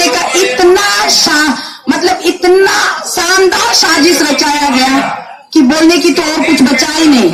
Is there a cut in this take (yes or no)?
no